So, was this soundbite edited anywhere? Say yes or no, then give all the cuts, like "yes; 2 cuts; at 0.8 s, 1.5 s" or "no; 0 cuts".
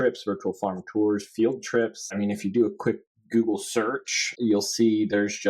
yes; 2 cuts; at 2.2 s, 4.2 s